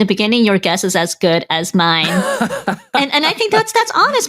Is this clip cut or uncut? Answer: uncut